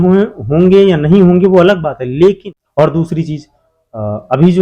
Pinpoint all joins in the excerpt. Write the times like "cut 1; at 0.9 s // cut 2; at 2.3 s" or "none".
cut 1; at 2.5 s